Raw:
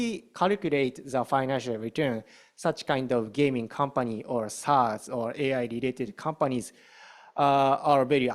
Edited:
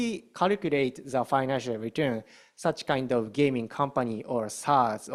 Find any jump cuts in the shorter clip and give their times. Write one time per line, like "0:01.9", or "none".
none